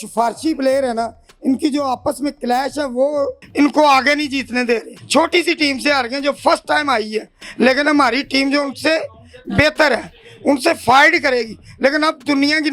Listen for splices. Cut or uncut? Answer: uncut